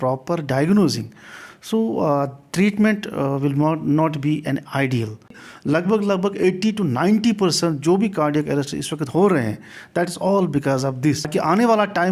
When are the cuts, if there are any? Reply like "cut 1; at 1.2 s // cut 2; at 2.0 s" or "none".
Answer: cut 1; at 5.5 s // cut 2; at 11.3 s

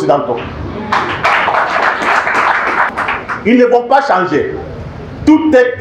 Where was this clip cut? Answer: cut 1; at 2.9 s

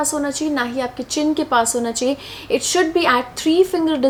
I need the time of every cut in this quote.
none

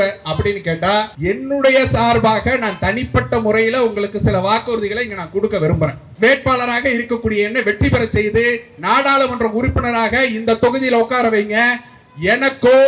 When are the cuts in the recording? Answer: cut 1; at 1.1 s // cut 2; at 6.1 s

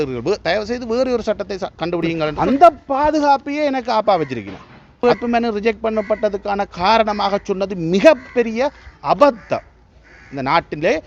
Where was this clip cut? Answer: cut 1; at 2.3 s // cut 2; at 5.0 s

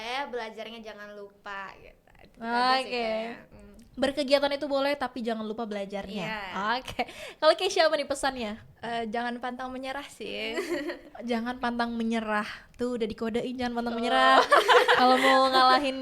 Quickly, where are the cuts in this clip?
none

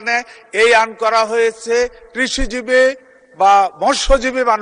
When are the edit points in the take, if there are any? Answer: none

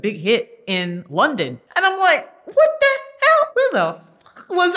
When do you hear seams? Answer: cut 1; at 1.6 s // cut 2; at 3.5 s

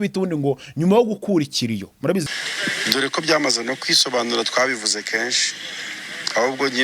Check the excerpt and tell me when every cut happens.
cut 1; at 2.2 s

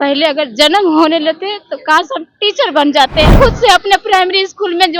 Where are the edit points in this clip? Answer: cut 1; at 3.3 s

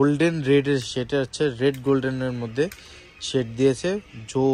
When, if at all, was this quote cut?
none

